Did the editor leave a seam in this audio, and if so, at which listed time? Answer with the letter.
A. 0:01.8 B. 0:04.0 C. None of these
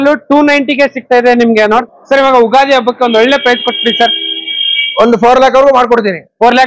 A